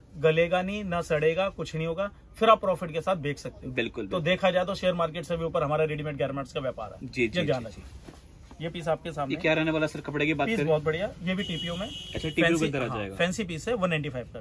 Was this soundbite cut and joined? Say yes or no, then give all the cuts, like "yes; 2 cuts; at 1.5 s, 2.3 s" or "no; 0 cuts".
no; 0 cuts